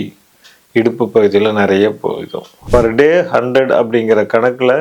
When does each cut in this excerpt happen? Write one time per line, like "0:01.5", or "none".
0:02.6